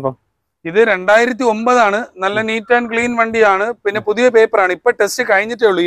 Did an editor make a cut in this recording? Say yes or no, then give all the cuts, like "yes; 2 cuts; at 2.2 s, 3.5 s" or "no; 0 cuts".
no; 0 cuts